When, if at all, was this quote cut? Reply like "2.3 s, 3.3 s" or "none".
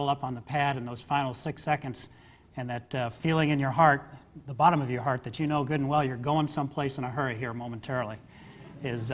1.6 s